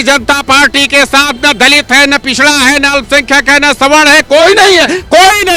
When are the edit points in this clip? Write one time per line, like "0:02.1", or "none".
none